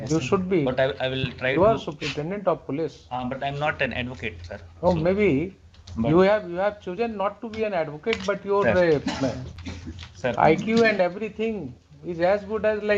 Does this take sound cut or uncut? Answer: uncut